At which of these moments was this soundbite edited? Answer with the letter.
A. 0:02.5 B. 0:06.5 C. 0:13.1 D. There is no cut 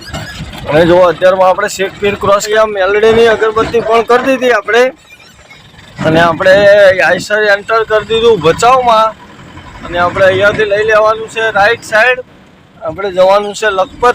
A